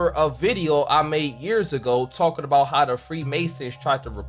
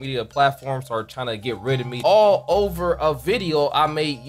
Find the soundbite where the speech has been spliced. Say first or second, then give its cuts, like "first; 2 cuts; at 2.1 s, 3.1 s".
second; 1 cut; at 1.9 s